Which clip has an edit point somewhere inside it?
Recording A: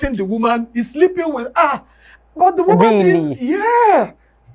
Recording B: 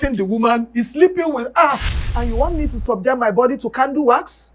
B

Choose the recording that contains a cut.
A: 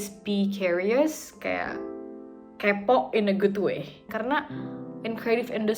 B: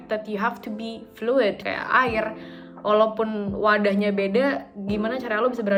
A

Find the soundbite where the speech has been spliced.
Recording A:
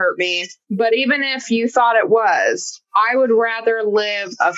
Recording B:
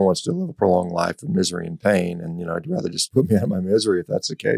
B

